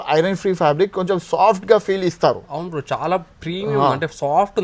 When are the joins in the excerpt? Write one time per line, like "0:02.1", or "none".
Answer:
none